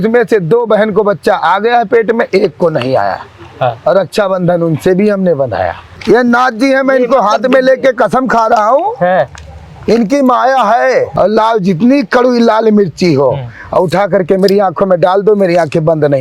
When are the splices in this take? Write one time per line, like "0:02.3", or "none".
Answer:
0:05.9
0:11.1